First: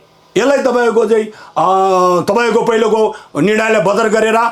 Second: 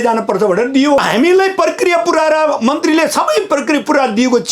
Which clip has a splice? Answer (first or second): second